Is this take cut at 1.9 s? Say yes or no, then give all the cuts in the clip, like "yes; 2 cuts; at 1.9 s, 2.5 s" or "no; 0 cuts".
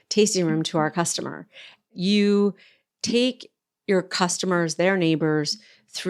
yes; 1 cut; at 1.9 s